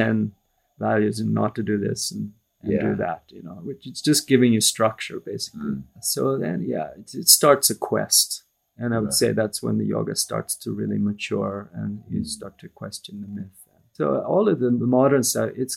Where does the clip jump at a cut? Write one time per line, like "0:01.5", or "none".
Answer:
0:06.0
0:13.9